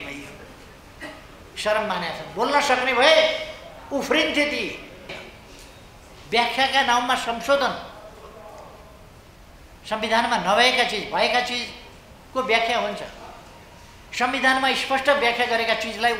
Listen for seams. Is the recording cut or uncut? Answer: cut